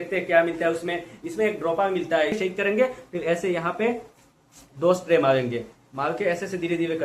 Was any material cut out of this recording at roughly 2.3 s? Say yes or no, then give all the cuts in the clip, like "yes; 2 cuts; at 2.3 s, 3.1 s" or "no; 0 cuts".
yes; 1 cut; at 2.3 s